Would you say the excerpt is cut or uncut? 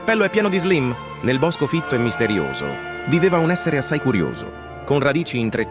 uncut